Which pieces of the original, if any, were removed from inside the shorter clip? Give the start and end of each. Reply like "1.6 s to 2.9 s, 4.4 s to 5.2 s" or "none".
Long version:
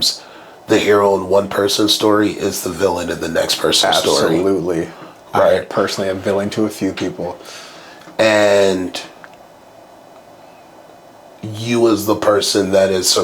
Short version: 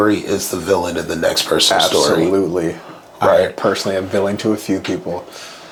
none